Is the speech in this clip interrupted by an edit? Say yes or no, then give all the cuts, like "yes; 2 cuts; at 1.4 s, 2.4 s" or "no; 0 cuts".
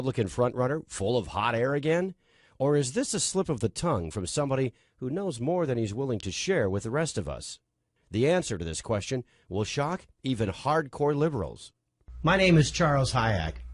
no; 0 cuts